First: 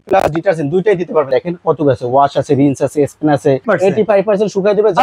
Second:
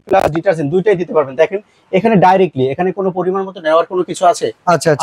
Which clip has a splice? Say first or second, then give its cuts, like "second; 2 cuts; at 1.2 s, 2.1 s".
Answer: first; 2 cuts; at 1.3 s, 3.6 s